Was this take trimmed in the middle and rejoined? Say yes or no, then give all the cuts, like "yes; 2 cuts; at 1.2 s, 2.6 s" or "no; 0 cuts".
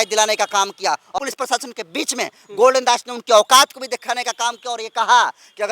yes; 1 cut; at 1.1 s